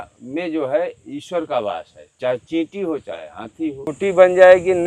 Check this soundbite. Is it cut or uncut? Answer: cut